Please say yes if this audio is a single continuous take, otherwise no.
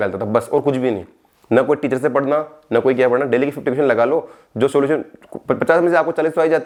yes